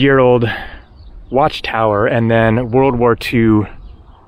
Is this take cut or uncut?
uncut